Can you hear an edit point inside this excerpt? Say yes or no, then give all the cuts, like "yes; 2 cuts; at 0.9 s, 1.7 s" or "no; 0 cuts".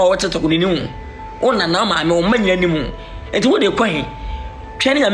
no; 0 cuts